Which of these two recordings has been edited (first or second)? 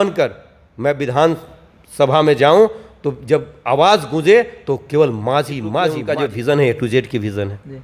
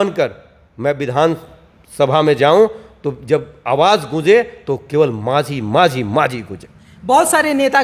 first